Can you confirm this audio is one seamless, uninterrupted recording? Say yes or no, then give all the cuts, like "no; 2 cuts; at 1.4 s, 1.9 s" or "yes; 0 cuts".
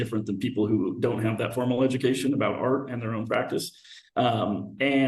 yes; 0 cuts